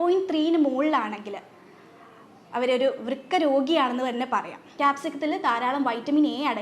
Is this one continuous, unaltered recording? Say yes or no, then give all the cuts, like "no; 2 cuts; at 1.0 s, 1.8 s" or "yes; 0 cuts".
no; 1 cut; at 4.6 s